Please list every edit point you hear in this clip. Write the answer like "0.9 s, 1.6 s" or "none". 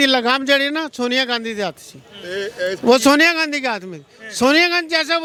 none

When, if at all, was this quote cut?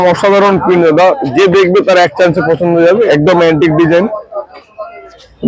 3.1 s

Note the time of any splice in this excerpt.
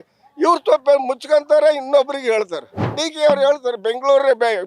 3.0 s

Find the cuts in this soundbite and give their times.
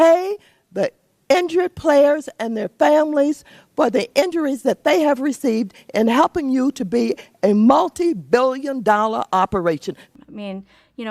10.0 s

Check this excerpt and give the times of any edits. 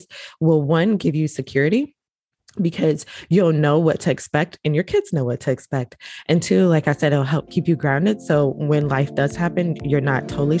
none

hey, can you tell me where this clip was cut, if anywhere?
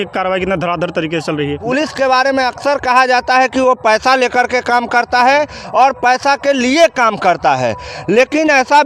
1.6 s

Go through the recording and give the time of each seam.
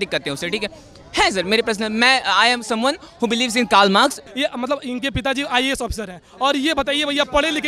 4.2 s

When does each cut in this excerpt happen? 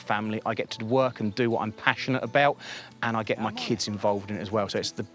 none

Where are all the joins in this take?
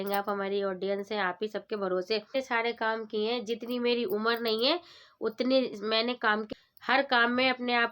2.3 s, 6.2 s

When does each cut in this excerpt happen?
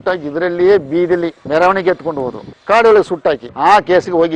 1.4 s, 3.5 s

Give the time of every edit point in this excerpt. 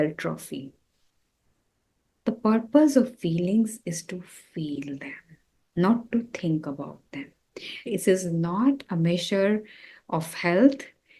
1.1 s, 7.9 s

